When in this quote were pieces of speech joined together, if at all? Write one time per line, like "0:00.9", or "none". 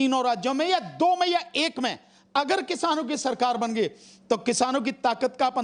none